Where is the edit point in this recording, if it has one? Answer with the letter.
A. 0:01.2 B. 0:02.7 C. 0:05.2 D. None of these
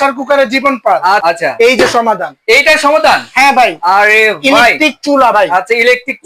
A